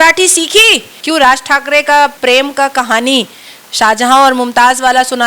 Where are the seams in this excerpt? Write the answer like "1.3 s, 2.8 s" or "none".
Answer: 0.9 s, 2.2 s